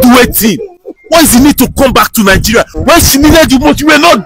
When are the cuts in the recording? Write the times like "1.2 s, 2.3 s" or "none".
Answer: 2.7 s